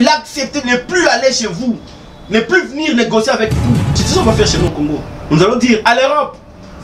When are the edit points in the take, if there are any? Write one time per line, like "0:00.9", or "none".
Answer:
0:04.0